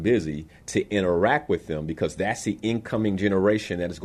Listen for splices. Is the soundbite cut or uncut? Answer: uncut